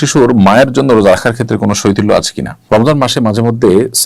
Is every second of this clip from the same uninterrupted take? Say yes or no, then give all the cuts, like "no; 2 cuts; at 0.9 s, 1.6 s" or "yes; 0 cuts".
no; 1 cut; at 2.5 s